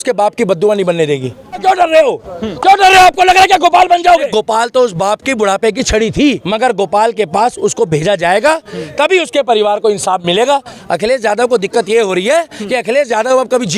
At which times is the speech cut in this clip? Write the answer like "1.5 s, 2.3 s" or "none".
1.6 s, 4.3 s, 6.4 s, 10.7 s

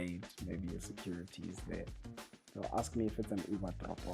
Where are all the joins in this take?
none

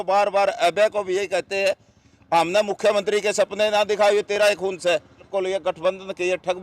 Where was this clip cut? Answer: 5.3 s

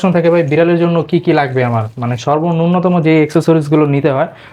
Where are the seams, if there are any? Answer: none

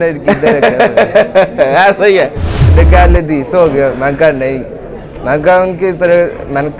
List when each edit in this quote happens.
2.7 s

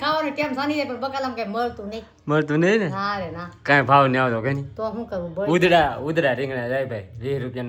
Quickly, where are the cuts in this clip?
none

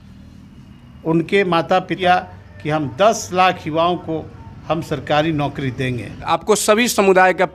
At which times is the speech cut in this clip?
1.9 s, 6.3 s

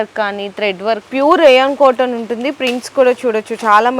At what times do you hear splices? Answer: 1.0 s

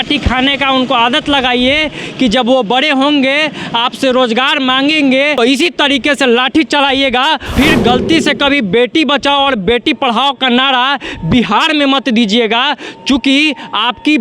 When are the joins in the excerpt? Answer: 5.4 s, 7.5 s

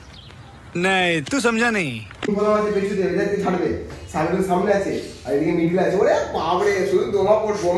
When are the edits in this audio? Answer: 2.3 s

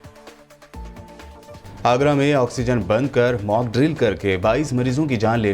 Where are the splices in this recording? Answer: 1.1 s

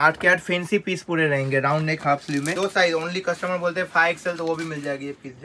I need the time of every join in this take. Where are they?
2.6 s

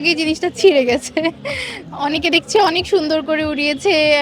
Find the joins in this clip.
none

